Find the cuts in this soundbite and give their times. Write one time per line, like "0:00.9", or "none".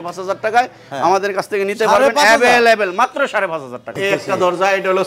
0:03.9